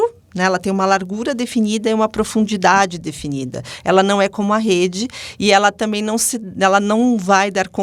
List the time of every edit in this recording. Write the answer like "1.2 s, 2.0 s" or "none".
none